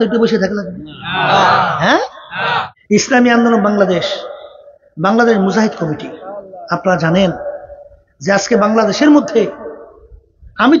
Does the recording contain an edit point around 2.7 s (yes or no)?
yes